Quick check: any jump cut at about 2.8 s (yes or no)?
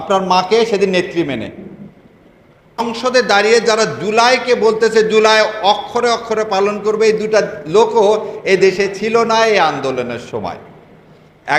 yes